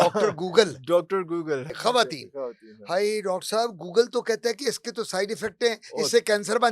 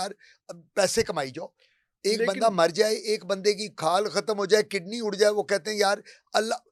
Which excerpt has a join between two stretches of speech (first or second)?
first